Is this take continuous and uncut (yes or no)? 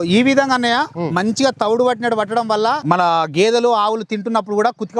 no